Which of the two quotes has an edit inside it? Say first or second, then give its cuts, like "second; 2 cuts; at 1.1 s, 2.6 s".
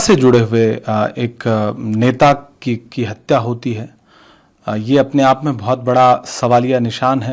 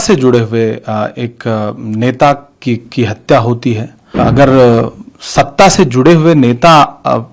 second; 1 cut; at 4.1 s